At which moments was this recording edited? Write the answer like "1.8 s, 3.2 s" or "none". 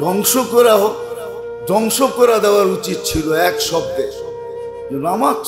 none